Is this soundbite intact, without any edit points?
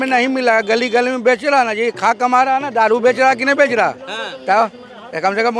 yes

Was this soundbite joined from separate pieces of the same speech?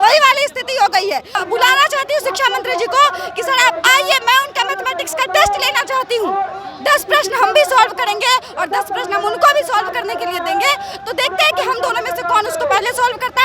yes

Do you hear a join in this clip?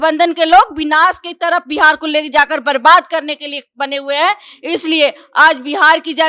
no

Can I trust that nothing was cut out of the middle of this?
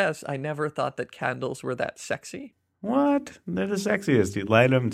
no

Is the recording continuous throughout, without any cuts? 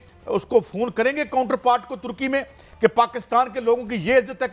yes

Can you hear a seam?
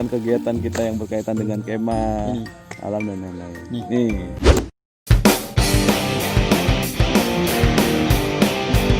no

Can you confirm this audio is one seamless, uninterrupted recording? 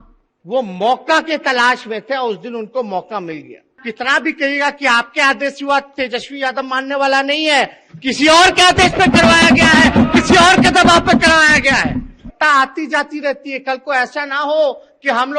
no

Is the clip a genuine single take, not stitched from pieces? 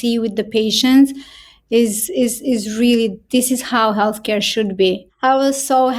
no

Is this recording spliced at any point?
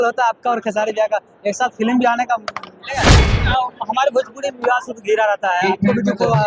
yes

